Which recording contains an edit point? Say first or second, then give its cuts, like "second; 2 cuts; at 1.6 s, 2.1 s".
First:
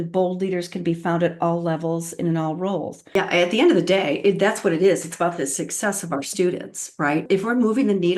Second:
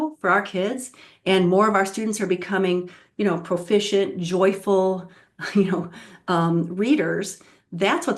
first; 2 cuts; at 3.2 s, 7.3 s